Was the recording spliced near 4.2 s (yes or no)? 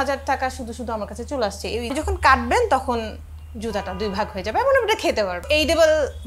no